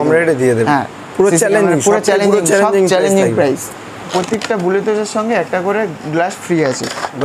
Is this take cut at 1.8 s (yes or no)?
no